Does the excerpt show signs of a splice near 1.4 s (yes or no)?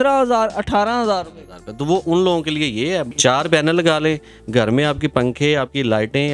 no